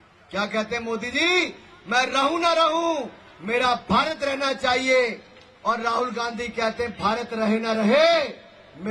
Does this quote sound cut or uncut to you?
uncut